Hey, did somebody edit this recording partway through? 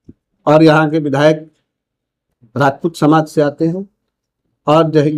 no; 0 cuts

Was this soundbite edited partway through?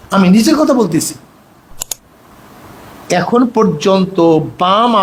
no; 0 cuts

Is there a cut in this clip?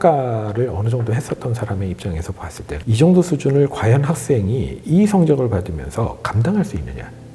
yes; 1 cut; at 2.7 s

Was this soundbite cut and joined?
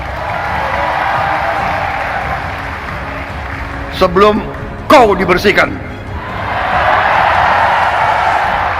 no; 0 cuts

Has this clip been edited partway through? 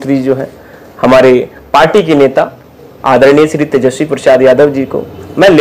no; 0 cuts

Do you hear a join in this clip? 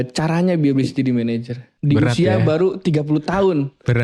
yes; 1 cut; at 1.7 s

